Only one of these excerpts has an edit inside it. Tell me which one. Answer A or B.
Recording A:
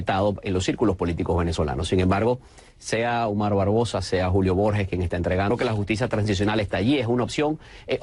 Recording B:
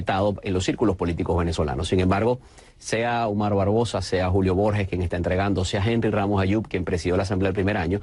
B